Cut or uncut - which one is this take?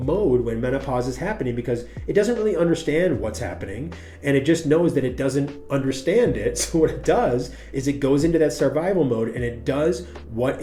uncut